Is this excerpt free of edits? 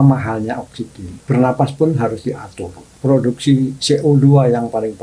no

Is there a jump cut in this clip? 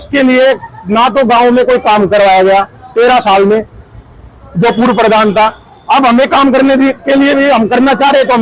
no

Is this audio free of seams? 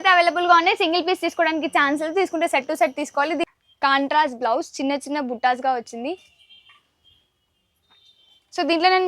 no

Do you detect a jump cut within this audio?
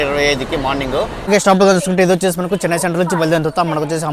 yes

